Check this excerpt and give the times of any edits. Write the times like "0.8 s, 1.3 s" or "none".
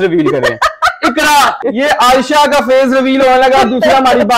1.6 s